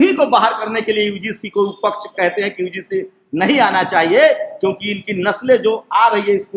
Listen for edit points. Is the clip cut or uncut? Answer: uncut